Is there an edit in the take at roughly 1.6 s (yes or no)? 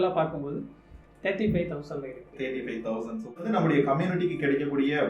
no